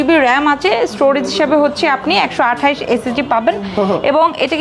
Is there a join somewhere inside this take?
no; 0 cuts

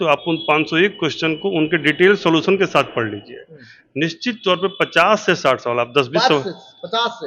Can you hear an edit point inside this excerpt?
no; 0 cuts

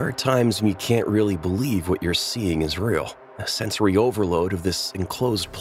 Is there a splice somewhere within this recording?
no; 0 cuts

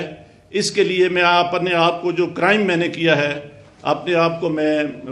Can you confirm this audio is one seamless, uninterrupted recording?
yes; 0 cuts

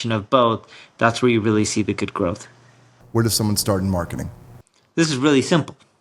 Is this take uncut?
no; 1 cut; at 3.0 s

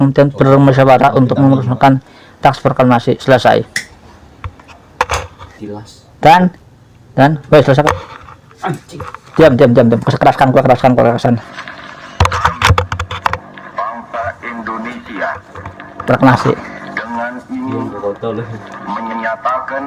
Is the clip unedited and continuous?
yes; 0 cuts

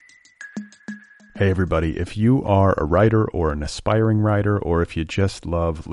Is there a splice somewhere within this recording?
yes; 1 cut; at 0.9 s

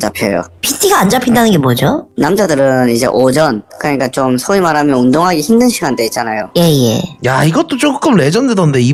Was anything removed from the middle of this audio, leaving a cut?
no; 0 cuts

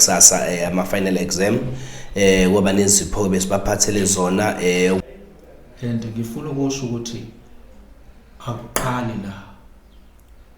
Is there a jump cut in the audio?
yes; 1 cut; at 5.0 s

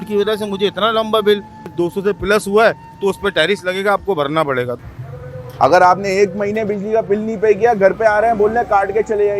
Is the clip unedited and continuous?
no; 2 cuts; at 1.6 s, 4.8 s

